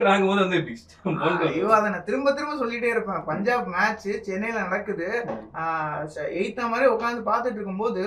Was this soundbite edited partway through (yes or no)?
no